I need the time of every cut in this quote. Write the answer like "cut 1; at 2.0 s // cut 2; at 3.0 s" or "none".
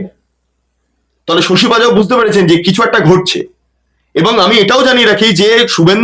none